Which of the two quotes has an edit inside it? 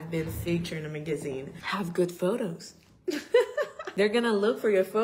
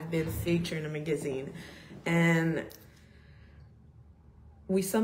first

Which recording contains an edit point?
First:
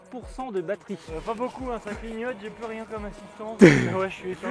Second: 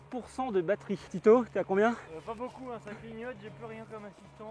first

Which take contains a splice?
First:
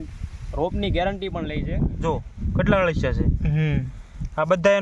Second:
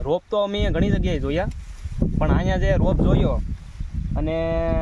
first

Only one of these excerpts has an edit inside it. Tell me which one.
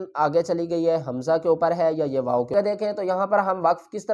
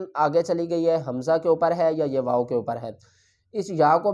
first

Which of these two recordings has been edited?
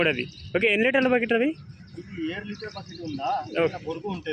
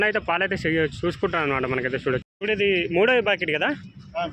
second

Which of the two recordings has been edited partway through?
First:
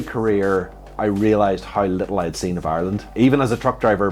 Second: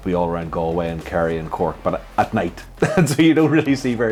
first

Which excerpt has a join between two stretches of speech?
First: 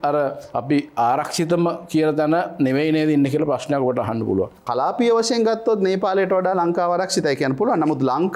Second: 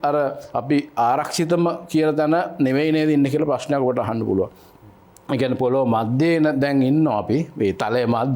first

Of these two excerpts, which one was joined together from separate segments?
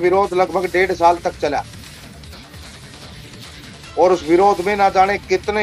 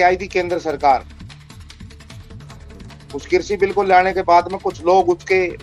first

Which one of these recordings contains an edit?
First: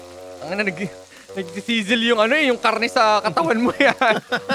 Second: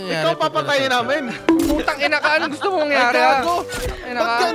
second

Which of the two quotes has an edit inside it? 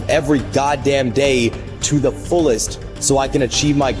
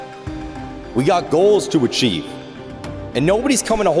second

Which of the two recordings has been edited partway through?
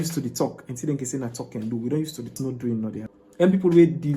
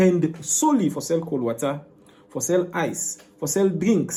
first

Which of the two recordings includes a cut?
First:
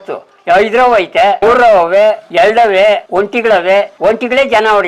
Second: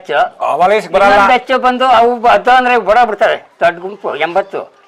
first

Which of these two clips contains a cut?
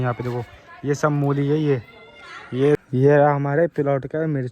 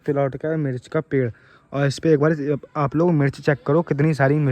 first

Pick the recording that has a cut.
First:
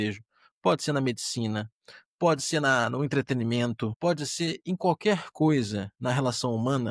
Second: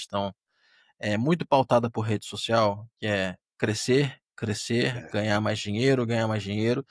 first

